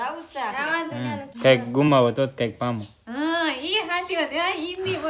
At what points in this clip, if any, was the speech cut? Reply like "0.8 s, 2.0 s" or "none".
1.3 s